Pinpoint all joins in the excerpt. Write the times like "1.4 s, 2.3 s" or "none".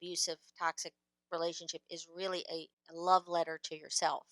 2.7 s